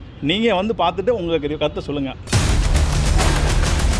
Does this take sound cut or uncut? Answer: cut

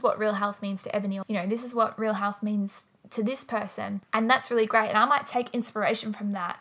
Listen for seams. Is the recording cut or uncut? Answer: cut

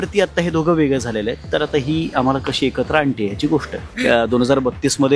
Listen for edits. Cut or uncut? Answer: cut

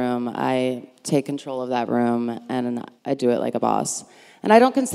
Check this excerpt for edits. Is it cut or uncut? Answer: cut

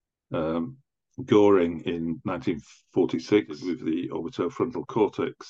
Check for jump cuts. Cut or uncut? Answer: cut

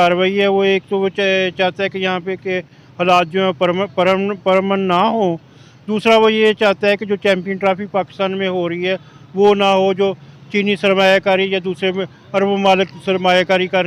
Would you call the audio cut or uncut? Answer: uncut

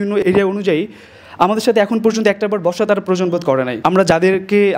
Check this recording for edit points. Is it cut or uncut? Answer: cut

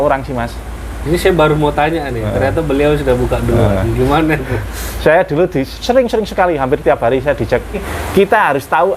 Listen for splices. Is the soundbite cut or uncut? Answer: cut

